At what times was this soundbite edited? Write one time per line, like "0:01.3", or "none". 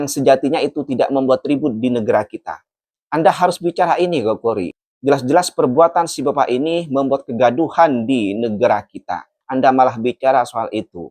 0:09.4